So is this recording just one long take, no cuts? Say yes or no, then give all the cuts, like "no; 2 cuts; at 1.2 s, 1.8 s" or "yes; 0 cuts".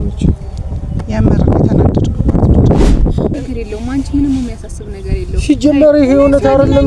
no; 1 cut; at 3.3 s